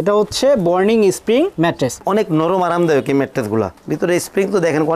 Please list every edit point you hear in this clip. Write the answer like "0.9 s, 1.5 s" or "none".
1.9 s